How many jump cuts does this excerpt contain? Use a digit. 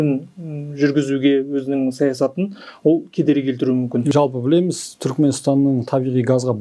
1